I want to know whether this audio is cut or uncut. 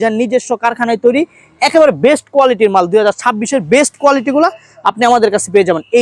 uncut